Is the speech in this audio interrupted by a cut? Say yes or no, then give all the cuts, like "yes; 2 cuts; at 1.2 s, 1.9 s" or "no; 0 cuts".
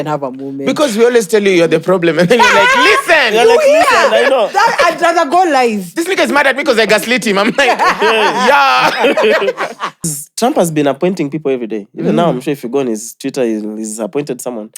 yes; 1 cut; at 10.1 s